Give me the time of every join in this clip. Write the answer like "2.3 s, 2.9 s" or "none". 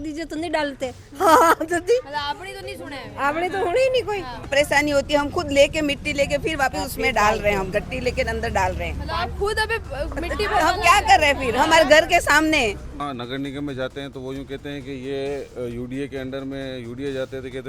4.5 s, 13.0 s

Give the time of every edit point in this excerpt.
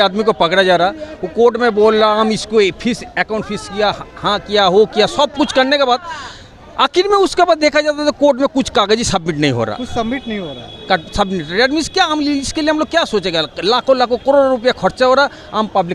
none

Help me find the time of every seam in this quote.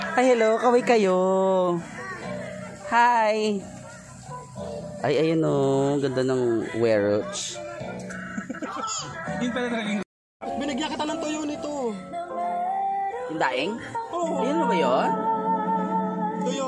10.2 s

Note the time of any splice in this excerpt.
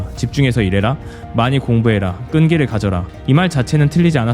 3.1 s

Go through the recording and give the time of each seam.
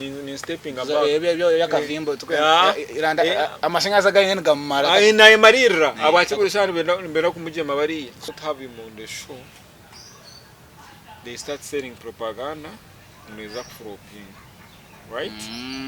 8.2 s

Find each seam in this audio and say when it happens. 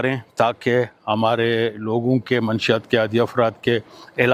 none

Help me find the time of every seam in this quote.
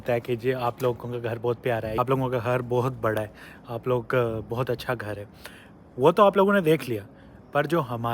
1.9 s

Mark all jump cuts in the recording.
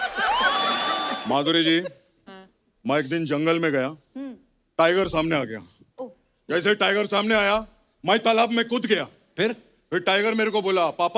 1.1 s

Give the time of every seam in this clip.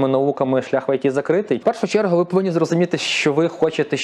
1.6 s

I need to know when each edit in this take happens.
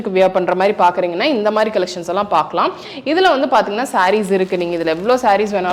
none

